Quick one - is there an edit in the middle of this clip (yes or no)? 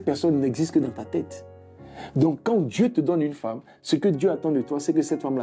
no